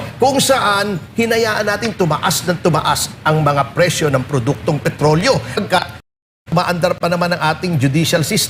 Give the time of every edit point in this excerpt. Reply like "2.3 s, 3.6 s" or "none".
5.5 s